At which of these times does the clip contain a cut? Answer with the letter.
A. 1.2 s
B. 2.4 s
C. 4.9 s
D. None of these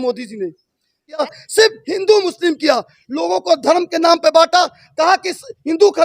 A